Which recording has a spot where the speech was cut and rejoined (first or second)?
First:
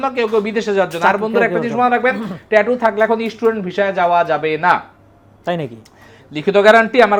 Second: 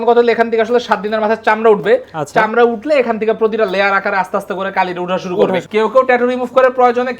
second